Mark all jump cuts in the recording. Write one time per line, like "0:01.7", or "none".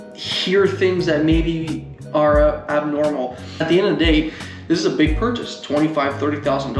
0:03.5